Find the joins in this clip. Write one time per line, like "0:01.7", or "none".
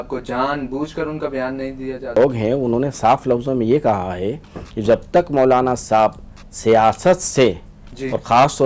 0:02.2